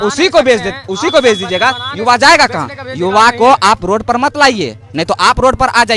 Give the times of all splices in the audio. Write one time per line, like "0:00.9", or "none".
none